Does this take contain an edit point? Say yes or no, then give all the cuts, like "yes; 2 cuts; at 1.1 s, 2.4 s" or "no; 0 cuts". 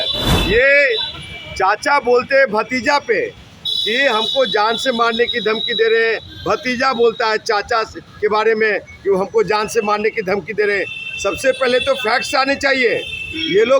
no; 0 cuts